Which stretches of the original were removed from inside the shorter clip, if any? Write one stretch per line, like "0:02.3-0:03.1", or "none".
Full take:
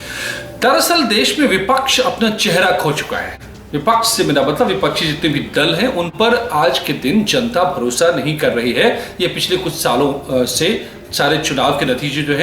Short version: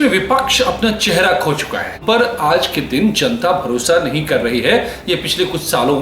0:03.4-0:06.1